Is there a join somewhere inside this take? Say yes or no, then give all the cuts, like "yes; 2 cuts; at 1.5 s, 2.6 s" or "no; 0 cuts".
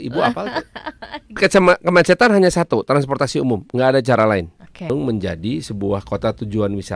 yes; 2 cuts; at 1.4 s, 4.9 s